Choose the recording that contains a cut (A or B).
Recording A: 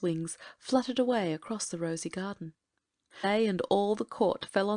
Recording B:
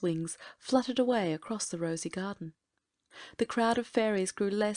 B